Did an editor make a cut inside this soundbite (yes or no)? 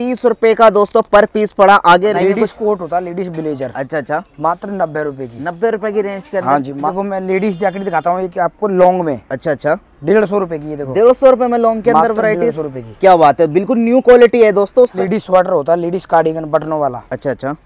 yes